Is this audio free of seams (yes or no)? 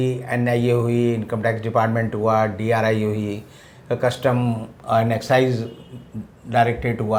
yes